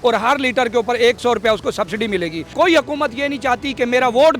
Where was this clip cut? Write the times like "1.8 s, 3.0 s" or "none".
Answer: 2.4 s

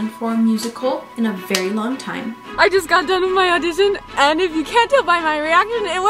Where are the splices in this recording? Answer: 1.1 s, 2.4 s

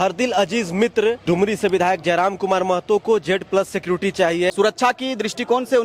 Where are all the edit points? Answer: 1.2 s, 4.5 s

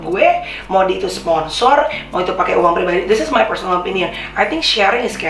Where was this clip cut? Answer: none

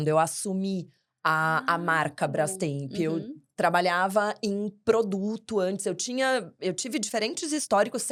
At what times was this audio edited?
none

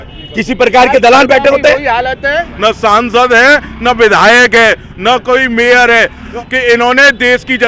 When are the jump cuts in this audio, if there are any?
2.5 s, 6.3 s

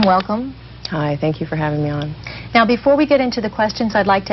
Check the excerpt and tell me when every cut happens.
2.3 s

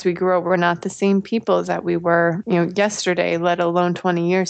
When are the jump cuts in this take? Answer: 2.4 s

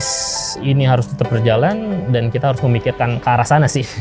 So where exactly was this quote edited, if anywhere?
none

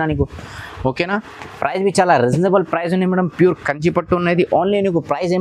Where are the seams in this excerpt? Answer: none

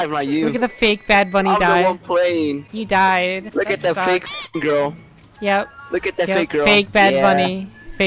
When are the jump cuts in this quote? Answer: 2.6 s

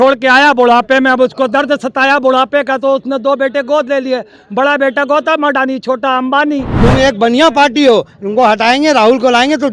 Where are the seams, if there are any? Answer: 6.7 s

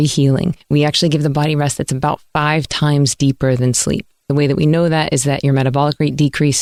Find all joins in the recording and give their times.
none

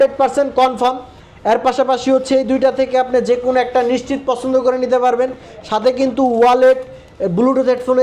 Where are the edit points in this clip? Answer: none

